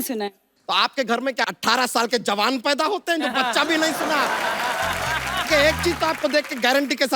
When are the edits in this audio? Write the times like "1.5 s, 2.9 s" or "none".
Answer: 1.5 s, 5.5 s